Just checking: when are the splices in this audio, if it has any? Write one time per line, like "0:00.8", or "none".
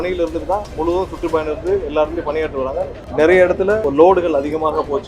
0:03.1
0:03.8